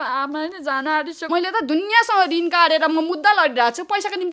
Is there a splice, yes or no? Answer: yes